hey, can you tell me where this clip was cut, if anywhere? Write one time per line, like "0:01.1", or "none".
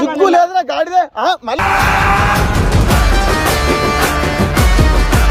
none